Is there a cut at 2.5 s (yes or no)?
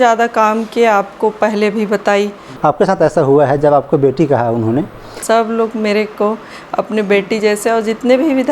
yes